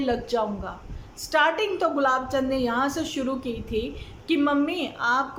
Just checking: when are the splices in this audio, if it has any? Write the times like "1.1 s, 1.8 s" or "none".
none